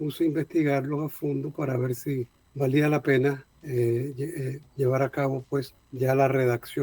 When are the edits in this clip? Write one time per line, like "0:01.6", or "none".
0:02.4
0:03.5
0:05.8